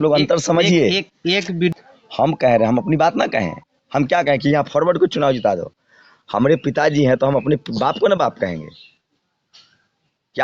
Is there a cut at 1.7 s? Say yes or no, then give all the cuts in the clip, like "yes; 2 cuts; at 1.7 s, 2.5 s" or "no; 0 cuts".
yes; 1 cut; at 1.7 s